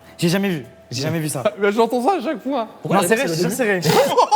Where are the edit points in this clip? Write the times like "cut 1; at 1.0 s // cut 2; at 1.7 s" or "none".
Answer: none